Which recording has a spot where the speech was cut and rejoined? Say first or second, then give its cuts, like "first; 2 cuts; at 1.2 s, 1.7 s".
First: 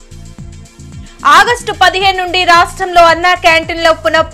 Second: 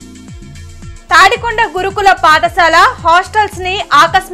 first; 1 cut; at 1.0 s